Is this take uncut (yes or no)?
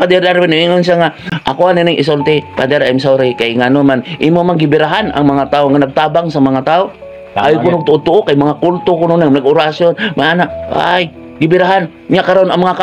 no